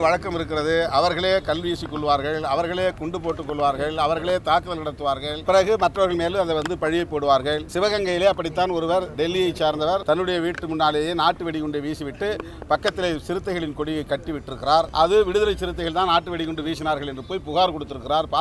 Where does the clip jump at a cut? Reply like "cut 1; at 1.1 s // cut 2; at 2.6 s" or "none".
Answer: cut 1; at 5.4 s // cut 2; at 7.7 s // cut 3; at 9.1 s // cut 4; at 10.0 s // cut 5; at 14.9 s